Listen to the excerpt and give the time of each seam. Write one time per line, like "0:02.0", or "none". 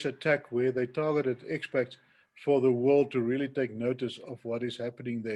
none